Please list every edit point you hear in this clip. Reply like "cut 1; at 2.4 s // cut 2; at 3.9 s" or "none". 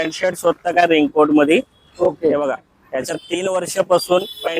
none